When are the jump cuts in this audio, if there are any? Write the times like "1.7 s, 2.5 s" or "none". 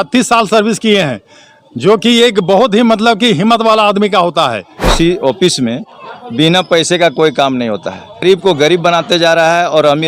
4.9 s, 8.2 s